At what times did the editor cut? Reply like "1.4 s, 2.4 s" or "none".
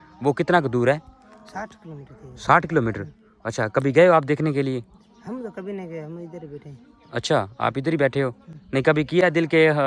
none